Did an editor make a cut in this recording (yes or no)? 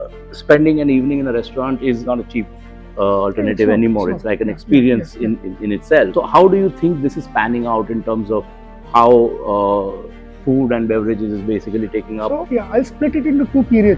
yes